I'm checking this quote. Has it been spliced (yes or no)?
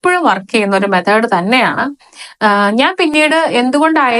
no